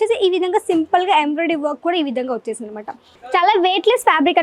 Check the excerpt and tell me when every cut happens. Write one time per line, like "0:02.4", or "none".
0:03.2